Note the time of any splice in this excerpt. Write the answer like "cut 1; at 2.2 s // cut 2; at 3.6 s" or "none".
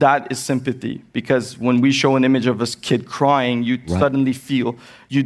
none

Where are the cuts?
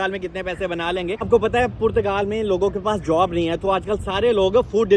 cut 1; at 1.3 s

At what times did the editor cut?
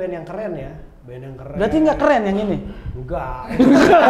none

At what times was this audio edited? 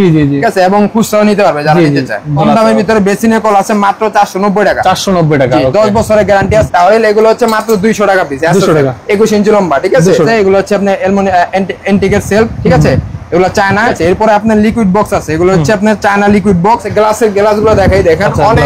cut 1; at 2.4 s // cut 2; at 6.7 s // cut 3; at 10.3 s // cut 4; at 13.9 s // cut 5; at 16.9 s

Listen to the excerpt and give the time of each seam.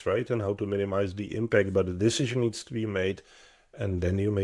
none

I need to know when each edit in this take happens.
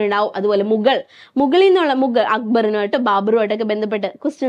none

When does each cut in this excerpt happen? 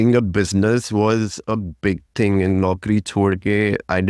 none

